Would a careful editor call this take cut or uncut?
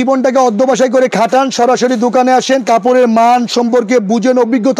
uncut